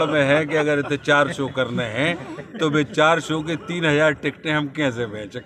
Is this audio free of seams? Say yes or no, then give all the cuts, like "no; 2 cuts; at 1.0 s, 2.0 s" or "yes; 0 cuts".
yes; 0 cuts